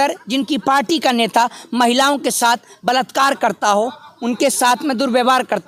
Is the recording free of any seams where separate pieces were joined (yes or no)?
yes